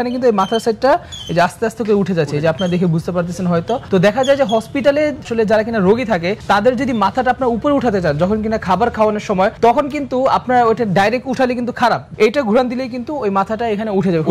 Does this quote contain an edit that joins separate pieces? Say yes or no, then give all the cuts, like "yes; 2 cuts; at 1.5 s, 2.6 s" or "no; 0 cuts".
yes; 1 cut; at 12.1 s